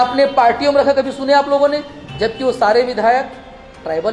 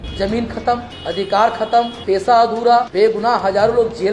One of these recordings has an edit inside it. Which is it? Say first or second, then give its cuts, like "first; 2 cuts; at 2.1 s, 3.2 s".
second; 3 cuts; at 0.9 s, 2.0 s, 2.9 s